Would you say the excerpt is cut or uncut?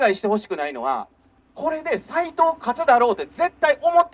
uncut